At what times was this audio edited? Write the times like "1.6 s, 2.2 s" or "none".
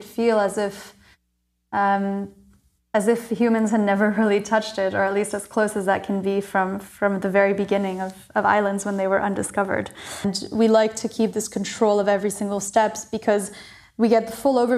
10.3 s